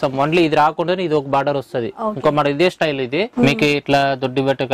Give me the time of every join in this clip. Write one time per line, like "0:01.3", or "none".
0:03.3